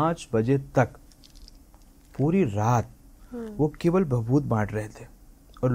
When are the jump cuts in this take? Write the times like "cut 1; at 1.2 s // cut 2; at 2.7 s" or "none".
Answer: none